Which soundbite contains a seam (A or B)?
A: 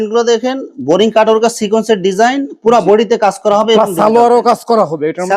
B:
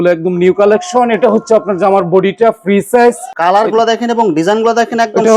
B